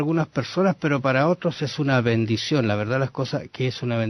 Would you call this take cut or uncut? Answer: uncut